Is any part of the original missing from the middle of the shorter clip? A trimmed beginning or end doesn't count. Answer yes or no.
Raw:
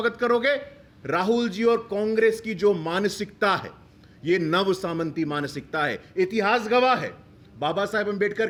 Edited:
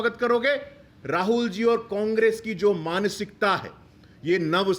no